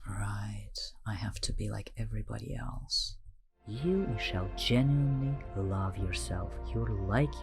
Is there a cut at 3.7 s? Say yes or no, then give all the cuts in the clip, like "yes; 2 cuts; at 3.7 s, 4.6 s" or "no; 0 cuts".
yes; 1 cut; at 3.7 s